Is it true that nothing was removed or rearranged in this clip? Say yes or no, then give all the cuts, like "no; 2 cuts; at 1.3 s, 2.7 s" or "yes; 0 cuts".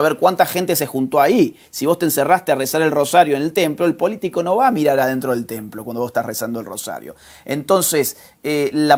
yes; 0 cuts